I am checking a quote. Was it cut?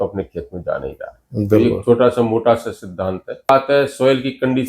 yes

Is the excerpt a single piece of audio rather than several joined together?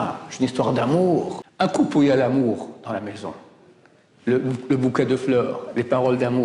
no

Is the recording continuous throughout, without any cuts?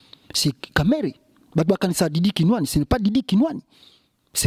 yes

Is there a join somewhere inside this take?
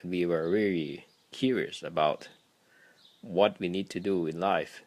no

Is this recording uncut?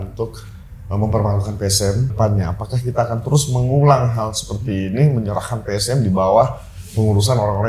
no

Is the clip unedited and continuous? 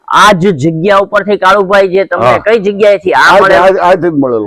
yes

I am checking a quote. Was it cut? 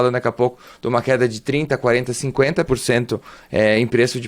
no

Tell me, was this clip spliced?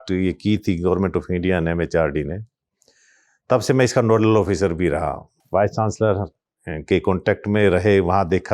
yes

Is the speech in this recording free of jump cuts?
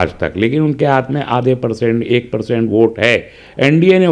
yes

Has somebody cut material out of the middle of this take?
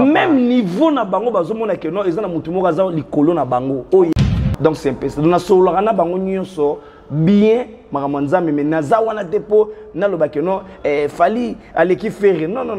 yes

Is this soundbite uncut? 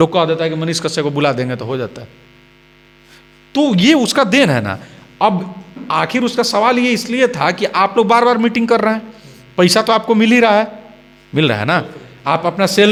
yes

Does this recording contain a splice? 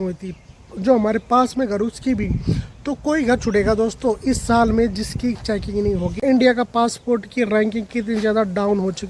yes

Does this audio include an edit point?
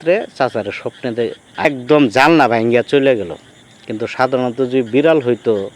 yes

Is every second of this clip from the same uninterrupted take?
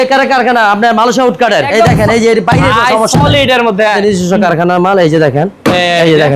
no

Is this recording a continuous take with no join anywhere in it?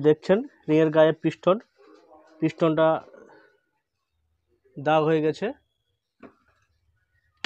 yes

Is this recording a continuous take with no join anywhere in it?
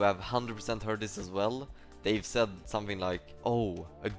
no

